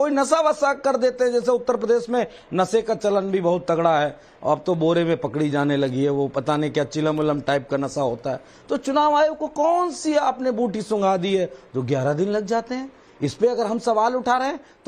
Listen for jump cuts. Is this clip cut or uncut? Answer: uncut